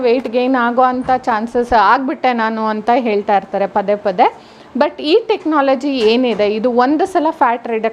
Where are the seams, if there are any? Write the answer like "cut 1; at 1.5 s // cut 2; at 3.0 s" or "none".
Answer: none